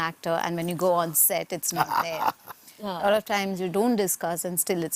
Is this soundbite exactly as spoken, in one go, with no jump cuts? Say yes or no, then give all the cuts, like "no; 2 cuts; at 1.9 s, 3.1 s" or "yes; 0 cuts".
yes; 0 cuts